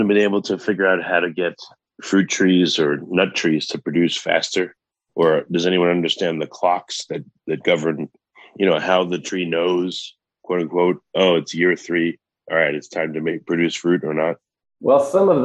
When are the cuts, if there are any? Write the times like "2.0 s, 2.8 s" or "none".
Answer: none